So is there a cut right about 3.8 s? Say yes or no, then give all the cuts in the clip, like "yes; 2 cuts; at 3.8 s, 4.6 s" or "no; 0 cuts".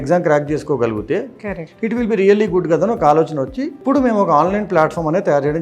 yes; 1 cut; at 3.8 s